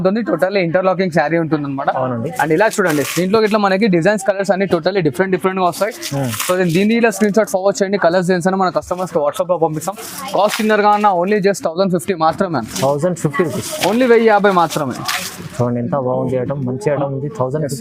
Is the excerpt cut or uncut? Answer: uncut